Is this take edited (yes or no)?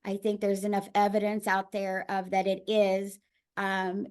no